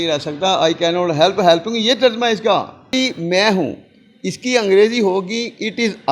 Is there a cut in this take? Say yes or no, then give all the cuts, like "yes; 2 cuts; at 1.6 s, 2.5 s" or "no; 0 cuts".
yes; 1 cut; at 2.9 s